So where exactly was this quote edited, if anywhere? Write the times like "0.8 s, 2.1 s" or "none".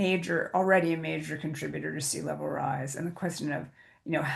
none